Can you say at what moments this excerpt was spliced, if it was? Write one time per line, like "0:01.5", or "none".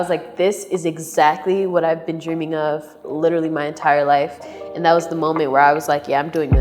none